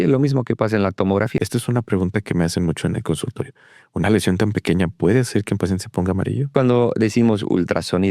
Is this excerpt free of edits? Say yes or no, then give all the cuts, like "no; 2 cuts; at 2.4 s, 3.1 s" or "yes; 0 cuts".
no; 2 cuts; at 1.4 s, 6.5 s